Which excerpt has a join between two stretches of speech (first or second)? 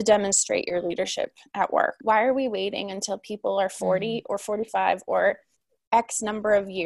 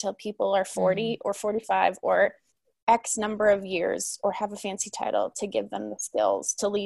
first